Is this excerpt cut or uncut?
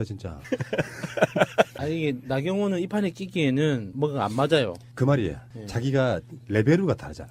cut